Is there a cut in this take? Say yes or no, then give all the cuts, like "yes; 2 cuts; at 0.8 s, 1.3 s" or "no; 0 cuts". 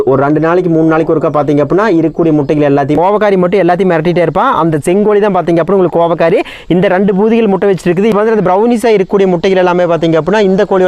yes; 2 cuts; at 2.9 s, 8.1 s